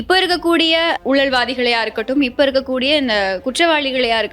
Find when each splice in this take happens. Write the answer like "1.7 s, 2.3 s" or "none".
1.0 s